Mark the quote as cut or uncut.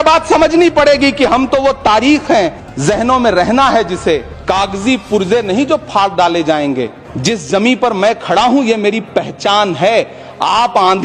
cut